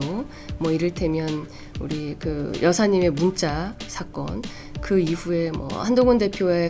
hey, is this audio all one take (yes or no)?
no